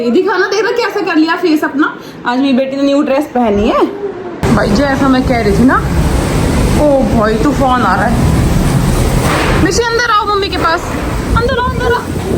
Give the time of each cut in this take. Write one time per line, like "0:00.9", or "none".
0:04.3